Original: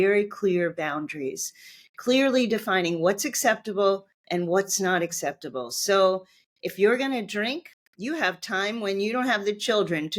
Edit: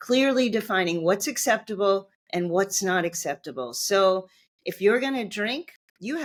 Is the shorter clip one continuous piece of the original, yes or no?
yes